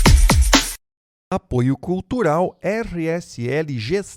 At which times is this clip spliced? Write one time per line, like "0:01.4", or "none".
0:01.0